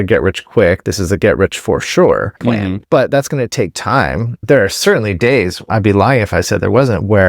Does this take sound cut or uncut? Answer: cut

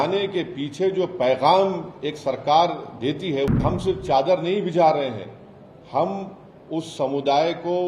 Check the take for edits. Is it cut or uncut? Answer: cut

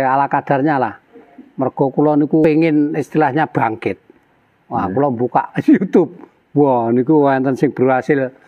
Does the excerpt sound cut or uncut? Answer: cut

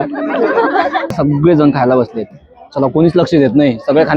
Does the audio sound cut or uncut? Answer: cut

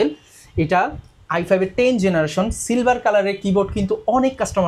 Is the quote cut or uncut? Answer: uncut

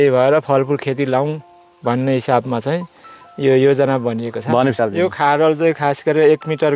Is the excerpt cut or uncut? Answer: cut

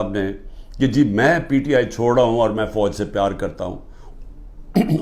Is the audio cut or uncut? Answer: uncut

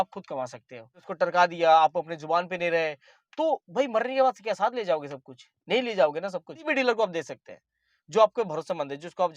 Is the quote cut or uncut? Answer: cut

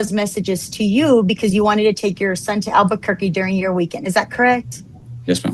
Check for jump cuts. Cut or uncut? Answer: uncut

